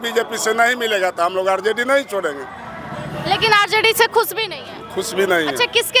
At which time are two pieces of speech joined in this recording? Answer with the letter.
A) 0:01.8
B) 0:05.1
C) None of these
C